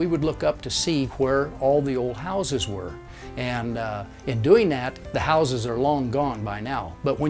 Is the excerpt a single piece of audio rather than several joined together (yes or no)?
yes